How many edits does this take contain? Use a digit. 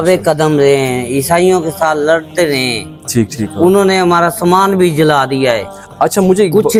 0